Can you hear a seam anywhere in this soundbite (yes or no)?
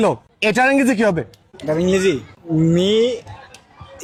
no